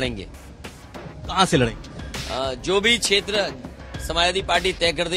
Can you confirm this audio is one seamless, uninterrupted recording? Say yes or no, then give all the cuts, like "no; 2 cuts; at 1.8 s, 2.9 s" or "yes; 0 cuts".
yes; 0 cuts